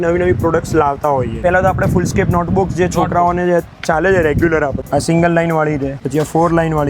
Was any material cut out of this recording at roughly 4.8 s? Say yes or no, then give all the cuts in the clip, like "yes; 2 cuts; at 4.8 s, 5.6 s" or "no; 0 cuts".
yes; 3 cuts; at 1.4 s, 4.8 s, 6.0 s